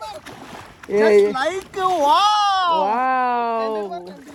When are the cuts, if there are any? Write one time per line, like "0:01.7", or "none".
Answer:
none